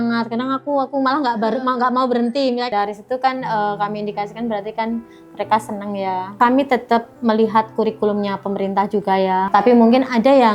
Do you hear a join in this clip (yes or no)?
yes